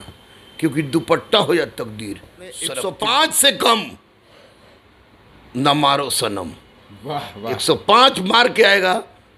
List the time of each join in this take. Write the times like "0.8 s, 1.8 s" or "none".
2.7 s